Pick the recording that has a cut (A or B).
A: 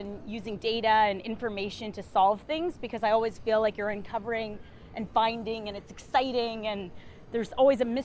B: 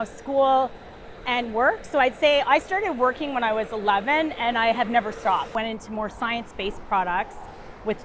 B